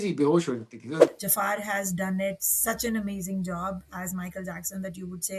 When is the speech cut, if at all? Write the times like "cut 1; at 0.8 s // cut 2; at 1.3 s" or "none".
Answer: cut 1; at 1.0 s